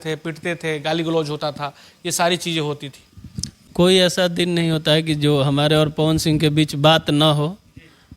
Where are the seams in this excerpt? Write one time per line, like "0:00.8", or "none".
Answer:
0:03.6